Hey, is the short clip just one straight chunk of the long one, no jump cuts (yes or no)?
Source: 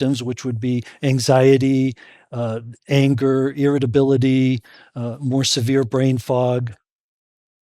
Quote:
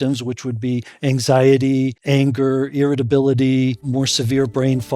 no